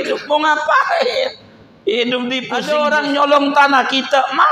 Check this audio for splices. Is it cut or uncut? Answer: cut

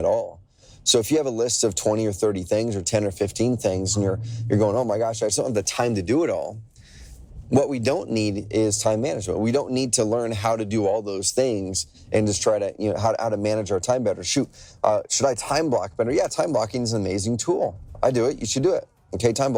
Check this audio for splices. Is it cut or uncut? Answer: uncut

